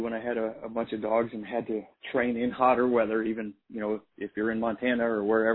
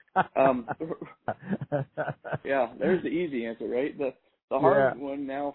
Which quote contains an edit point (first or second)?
second